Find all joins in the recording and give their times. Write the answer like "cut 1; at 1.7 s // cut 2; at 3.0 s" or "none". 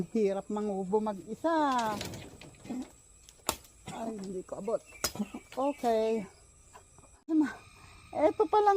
cut 1; at 7.3 s